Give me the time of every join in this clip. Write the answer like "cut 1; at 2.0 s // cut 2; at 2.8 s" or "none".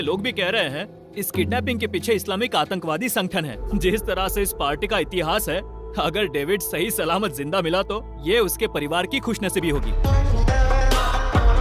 cut 1; at 3.6 s // cut 2; at 9.9 s